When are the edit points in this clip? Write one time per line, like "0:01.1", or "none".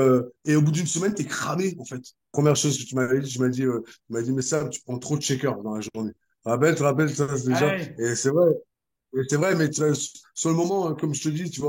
0:02.3